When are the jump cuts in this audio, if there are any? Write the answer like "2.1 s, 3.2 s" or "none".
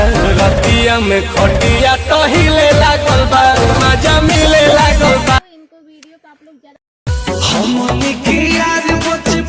5.4 s